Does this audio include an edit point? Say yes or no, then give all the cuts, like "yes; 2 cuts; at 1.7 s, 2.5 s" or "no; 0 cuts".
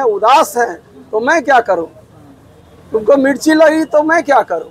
no; 0 cuts